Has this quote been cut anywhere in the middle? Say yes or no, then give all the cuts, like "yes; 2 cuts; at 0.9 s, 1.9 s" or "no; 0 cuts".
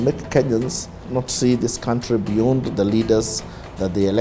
yes; 1 cut; at 1.0 s